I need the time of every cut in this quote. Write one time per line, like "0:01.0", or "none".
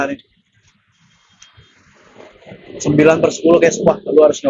none